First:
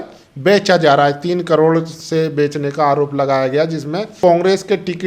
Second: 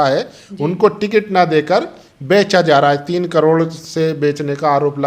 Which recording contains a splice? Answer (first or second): first